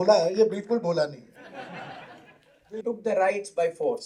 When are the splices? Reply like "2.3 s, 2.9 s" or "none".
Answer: 2.8 s